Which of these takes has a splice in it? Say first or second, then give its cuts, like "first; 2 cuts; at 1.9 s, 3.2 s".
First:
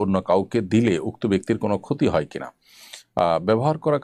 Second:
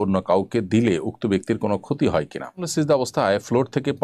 second; 1 cut; at 2.7 s